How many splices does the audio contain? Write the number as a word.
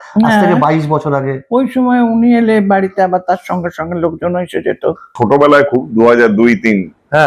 one